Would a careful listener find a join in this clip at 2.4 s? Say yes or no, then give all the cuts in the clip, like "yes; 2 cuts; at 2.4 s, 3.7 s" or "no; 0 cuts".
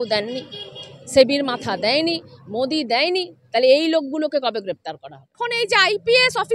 no; 1 cut; at 5.4 s